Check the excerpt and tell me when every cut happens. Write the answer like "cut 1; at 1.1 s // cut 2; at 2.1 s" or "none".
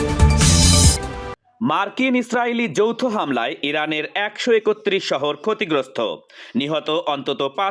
none